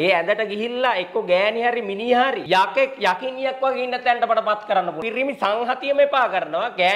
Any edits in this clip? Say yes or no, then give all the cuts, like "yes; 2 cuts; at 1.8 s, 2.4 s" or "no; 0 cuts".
yes; 2 cuts; at 2.4 s, 5.0 s